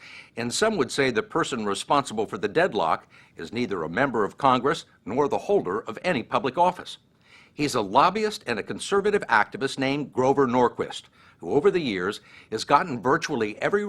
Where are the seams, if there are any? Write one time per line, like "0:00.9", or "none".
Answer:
0:01.0